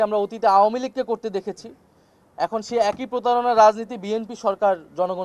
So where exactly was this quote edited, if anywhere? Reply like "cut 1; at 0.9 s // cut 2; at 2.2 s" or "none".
none